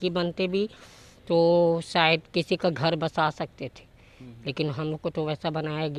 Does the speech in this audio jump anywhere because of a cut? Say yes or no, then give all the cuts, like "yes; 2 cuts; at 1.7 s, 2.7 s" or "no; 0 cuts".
no; 0 cuts